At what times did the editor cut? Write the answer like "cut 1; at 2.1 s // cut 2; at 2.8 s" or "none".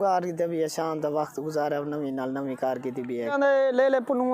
cut 1; at 3.3 s